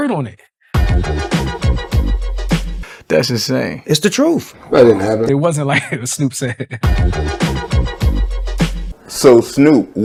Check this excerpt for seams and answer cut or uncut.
uncut